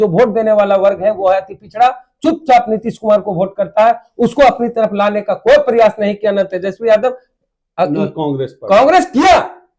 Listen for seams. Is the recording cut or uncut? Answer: uncut